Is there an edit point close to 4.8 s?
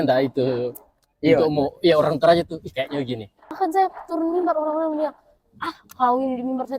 no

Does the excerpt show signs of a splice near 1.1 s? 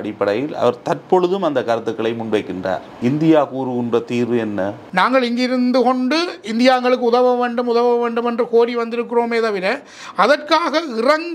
no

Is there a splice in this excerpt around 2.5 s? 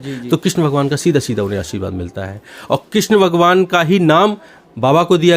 no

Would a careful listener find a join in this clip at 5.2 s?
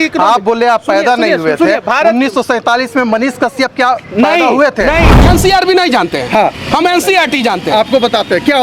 yes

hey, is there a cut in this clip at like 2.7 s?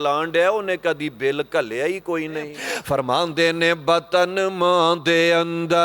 yes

